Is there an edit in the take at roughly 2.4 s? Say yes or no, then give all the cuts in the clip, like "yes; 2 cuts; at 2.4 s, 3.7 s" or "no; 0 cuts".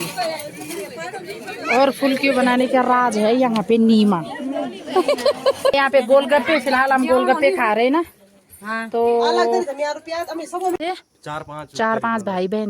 no; 2 cuts; at 5.7 s, 10.8 s